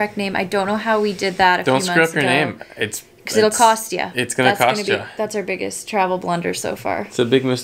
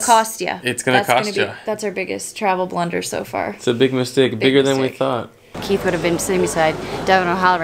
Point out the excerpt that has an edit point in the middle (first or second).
second